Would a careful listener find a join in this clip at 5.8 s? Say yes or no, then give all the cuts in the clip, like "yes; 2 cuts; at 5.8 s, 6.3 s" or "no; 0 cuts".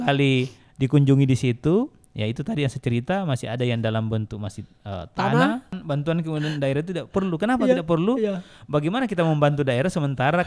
yes; 1 cut; at 5.8 s